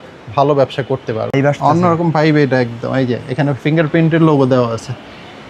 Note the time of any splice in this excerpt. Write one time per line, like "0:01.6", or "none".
0:01.3